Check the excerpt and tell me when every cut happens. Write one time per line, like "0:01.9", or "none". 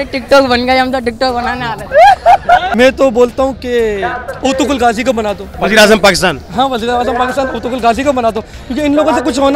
0:02.7
0:05.5